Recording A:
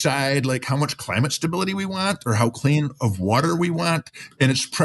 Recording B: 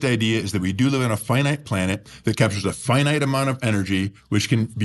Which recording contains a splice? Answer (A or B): B